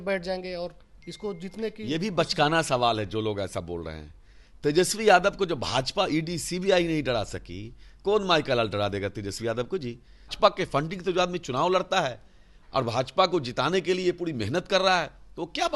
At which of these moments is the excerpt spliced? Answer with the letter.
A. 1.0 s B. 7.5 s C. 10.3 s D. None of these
C